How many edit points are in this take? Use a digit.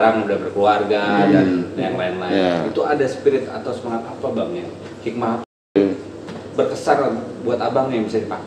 1